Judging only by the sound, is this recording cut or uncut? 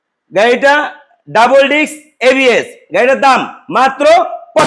uncut